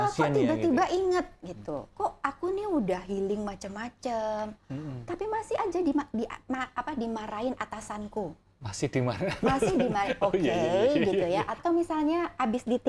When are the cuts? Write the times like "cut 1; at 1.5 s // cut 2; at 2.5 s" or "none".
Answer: cut 1; at 1.9 s // cut 2; at 11.6 s